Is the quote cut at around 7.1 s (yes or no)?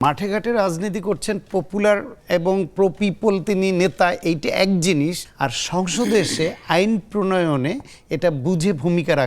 no